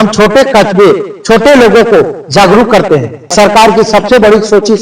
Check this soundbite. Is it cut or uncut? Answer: cut